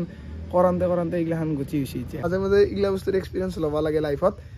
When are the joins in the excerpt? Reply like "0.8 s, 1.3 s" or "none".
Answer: 2.3 s